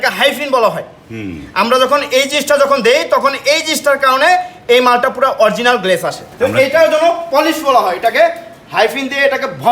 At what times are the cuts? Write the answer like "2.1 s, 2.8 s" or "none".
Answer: 6.3 s